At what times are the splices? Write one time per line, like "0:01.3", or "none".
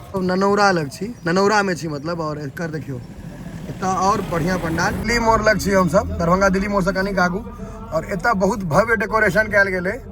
0:05.0